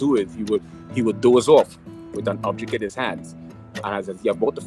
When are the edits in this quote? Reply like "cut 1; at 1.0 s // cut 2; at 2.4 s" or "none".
cut 1; at 1.2 s